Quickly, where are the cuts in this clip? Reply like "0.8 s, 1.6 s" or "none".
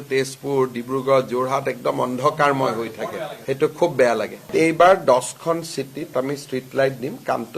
4.5 s, 6.1 s